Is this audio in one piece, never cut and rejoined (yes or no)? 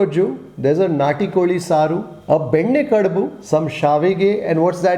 no